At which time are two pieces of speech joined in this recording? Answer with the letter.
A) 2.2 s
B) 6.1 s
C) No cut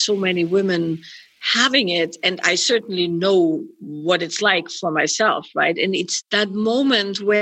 B